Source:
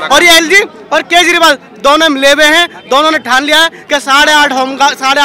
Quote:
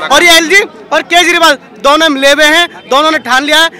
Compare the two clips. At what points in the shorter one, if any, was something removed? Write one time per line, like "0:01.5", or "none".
none